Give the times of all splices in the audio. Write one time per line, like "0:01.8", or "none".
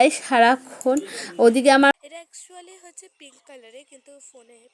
0:01.9